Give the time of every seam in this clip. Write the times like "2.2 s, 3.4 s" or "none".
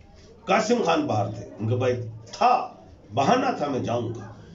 none